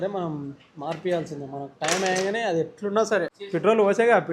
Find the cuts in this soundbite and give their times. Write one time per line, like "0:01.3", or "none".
0:03.4